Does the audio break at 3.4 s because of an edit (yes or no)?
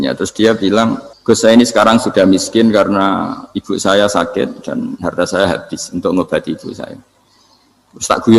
no